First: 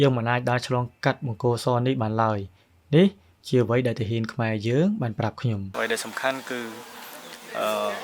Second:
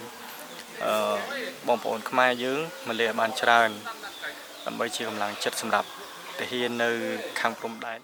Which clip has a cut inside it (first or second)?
first